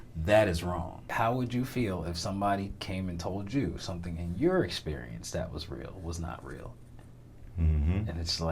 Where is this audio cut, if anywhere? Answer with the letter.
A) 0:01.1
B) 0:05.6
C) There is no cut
A